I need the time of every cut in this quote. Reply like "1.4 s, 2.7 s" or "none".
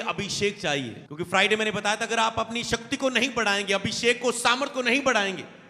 1.0 s